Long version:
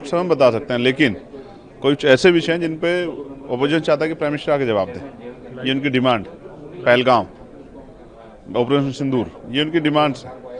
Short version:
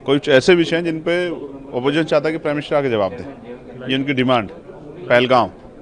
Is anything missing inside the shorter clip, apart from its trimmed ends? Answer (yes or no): no